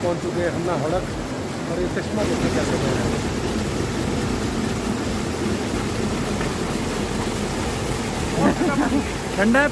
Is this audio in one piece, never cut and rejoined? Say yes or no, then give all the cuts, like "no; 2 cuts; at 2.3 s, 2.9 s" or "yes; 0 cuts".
yes; 0 cuts